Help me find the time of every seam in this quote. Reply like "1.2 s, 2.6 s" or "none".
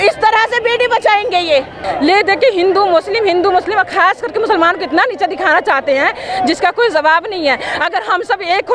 1.8 s